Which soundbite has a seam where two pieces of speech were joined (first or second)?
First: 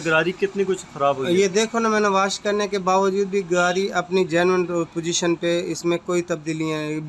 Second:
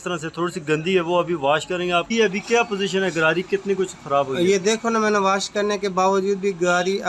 second